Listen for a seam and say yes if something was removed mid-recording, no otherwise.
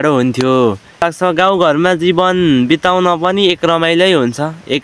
yes